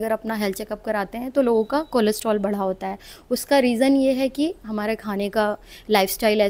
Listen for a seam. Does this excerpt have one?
no; 0 cuts

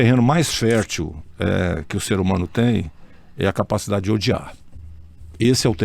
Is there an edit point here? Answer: no; 0 cuts

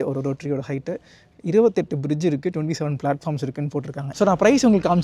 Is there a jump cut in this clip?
yes; 1 cut; at 4.1 s

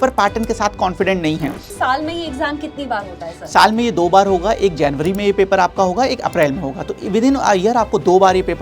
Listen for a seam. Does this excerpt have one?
yes; 1 cut; at 1.7 s

